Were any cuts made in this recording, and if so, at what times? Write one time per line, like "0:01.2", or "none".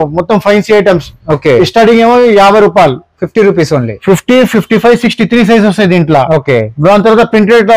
none

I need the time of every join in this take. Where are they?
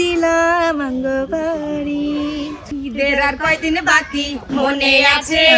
0:02.6

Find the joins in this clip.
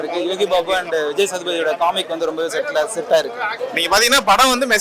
0:03.6

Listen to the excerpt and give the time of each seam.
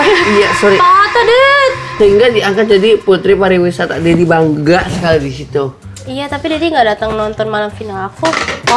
0:01.9

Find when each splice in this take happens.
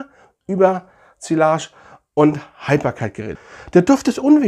0:03.3

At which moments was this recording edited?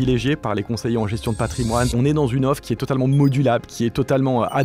0:01.9

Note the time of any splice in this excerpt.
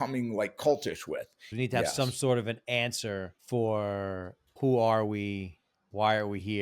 0:01.5
0:03.3
0:04.6

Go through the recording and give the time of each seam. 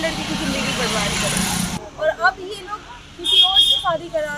0:01.8

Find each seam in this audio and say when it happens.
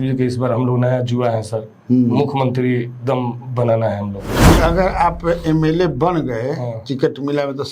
0:04.3

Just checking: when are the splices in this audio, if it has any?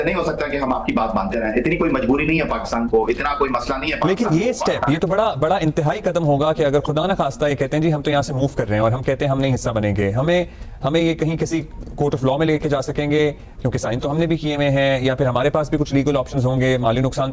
none

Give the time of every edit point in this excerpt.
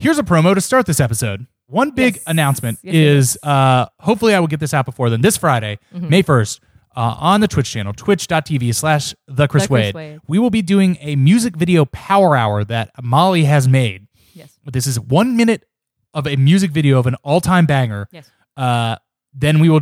0:01.7

